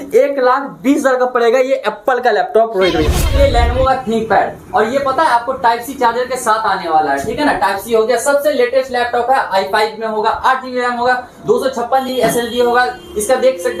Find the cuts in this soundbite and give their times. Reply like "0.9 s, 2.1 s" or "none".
3.4 s